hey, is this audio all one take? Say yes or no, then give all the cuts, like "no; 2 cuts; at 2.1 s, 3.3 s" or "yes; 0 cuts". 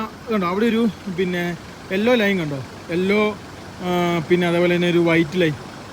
yes; 0 cuts